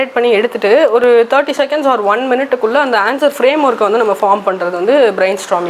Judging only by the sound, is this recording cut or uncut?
uncut